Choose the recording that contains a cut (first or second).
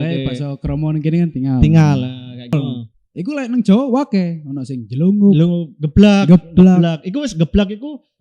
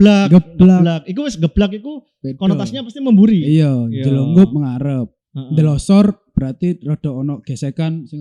first